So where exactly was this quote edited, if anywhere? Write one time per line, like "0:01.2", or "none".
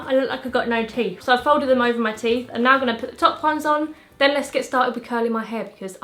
none